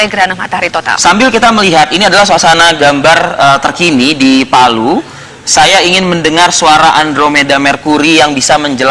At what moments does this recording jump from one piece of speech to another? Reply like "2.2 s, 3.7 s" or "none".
1.1 s